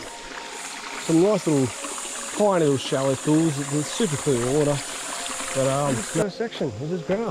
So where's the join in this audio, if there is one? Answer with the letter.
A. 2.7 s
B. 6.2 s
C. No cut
B